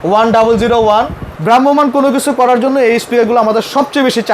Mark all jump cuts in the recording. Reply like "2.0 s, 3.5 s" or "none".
1.3 s